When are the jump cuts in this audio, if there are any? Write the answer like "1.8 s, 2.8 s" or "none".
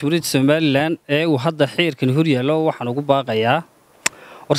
none